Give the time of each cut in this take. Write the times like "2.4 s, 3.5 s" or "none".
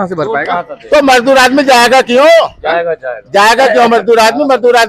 none

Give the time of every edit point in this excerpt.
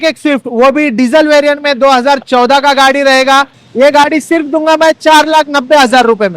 3.6 s

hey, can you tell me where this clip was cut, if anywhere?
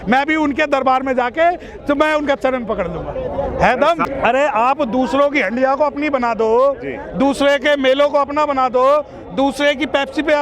4.0 s

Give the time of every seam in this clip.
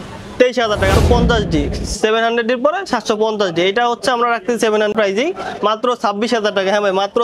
1.0 s, 4.9 s

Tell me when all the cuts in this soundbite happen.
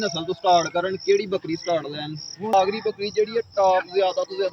2.5 s

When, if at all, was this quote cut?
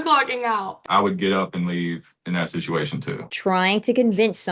0.8 s, 2.1 s, 3.2 s

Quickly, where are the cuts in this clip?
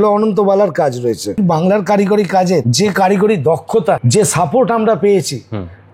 1.4 s, 2.7 s, 4.0 s

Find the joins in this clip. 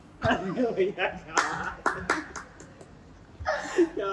none

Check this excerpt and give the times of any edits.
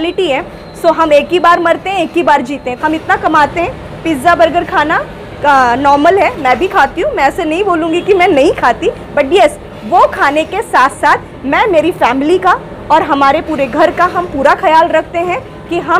2.6 s

